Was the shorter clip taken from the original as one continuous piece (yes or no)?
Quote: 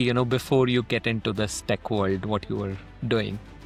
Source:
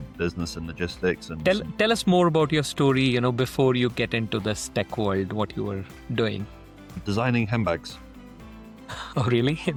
yes